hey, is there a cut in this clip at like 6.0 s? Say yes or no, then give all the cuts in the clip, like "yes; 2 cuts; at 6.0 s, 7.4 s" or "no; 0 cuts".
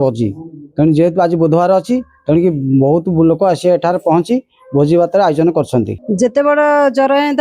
yes; 1 cut; at 6.0 s